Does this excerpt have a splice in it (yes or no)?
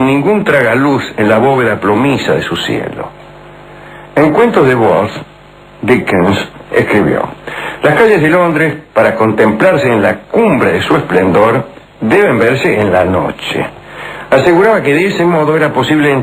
yes